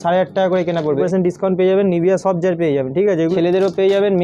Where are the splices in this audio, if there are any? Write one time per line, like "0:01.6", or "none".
0:01.0
0:03.3